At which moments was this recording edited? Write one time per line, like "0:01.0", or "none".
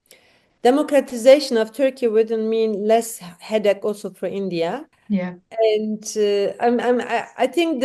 0:04.9